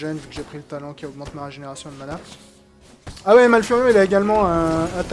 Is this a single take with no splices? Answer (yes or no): yes